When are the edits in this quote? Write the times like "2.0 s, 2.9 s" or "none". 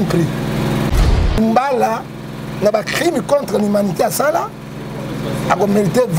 1.0 s